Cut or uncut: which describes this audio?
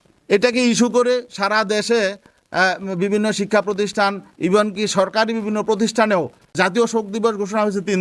cut